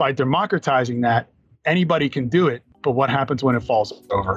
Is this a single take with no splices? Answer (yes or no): no